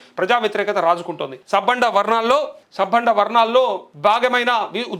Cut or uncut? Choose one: cut